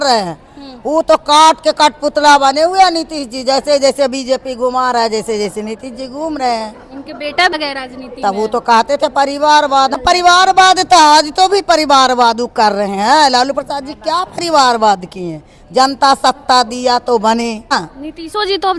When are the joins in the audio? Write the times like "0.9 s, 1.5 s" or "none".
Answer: 7.5 s, 10.0 s, 17.7 s